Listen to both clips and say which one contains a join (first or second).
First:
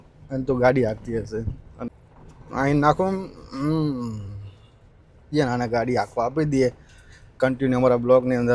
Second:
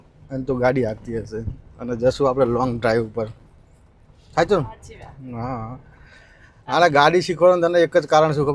first